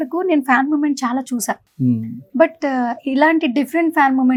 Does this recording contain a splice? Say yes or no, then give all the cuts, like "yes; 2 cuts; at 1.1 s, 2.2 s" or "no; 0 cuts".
no; 0 cuts